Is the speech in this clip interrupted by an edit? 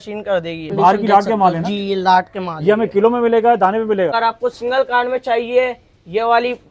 yes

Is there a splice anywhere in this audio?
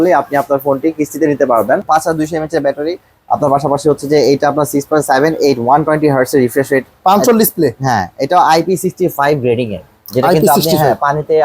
yes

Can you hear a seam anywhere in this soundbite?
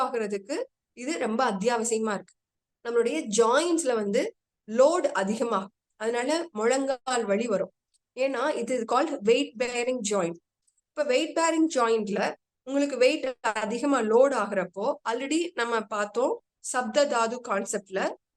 yes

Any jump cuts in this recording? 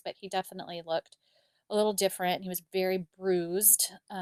no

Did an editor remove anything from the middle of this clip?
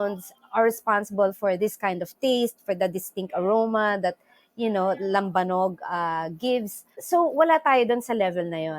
yes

